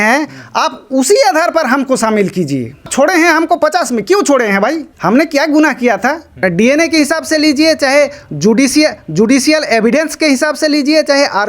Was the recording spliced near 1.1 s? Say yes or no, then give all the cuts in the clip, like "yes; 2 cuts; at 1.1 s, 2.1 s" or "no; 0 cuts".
no; 3 cuts; at 2.8 s, 4.9 s, 6.4 s